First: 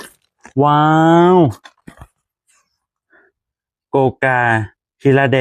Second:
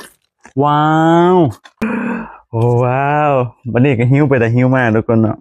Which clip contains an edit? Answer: second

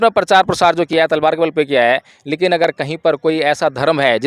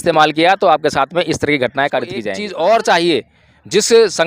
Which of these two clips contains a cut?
second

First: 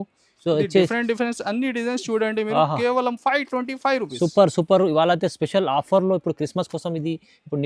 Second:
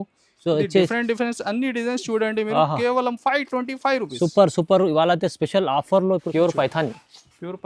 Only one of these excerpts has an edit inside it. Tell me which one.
second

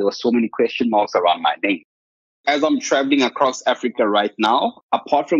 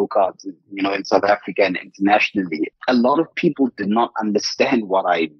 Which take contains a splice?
first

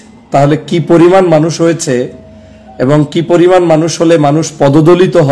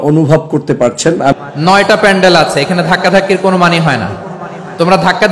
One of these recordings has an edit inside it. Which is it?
second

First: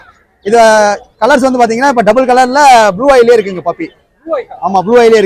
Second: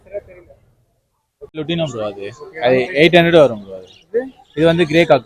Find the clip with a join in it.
second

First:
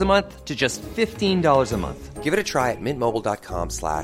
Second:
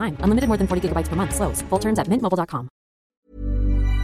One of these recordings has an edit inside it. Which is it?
second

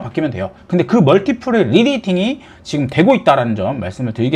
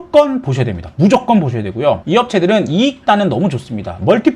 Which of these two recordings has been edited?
second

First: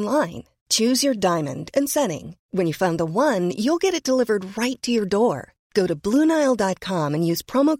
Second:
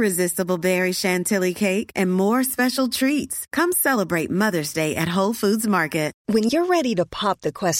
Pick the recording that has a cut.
second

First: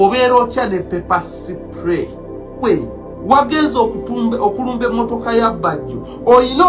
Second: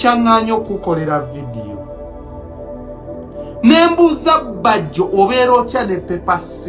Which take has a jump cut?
first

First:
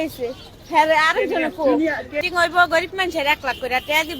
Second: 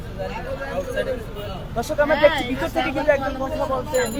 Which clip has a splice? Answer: first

